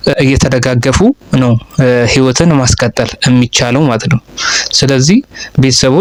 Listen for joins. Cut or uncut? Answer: uncut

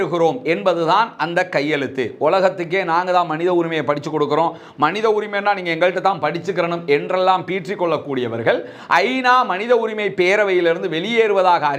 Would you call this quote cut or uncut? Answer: uncut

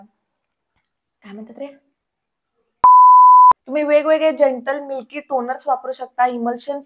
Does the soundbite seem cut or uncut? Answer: uncut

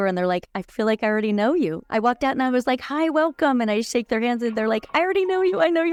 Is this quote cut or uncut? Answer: uncut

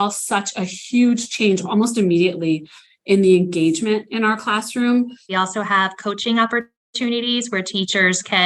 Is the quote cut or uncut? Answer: cut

